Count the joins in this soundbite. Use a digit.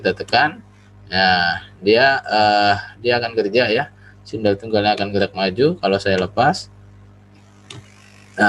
0